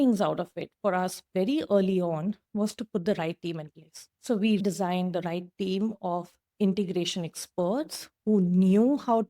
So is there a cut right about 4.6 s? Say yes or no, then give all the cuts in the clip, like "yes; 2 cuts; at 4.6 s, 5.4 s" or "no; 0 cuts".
yes; 1 cut; at 4.6 s